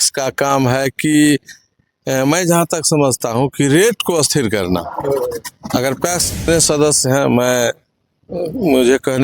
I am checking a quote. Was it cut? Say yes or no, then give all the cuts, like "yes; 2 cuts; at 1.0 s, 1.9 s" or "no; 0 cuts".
yes; 1 cut; at 6.5 s